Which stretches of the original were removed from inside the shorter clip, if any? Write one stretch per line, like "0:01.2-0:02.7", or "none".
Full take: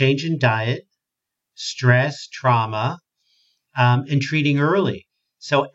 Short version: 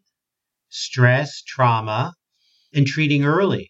0:03.6-0:04.0